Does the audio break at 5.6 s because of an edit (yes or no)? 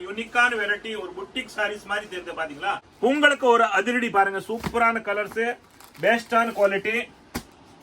no